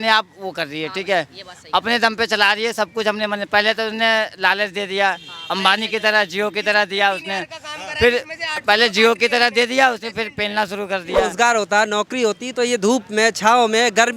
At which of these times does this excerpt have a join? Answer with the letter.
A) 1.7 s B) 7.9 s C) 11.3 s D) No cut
C